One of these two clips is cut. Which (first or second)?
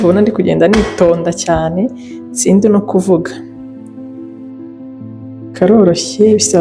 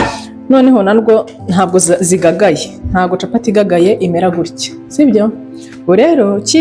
first